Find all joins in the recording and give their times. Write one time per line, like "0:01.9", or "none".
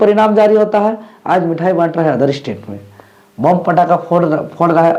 none